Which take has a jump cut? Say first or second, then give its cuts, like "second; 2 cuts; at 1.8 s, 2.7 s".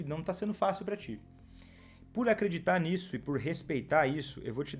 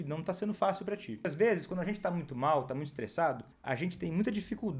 second; 2 cuts; at 1.2 s, 3.5 s